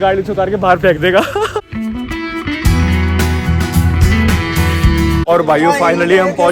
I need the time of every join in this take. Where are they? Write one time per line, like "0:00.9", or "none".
none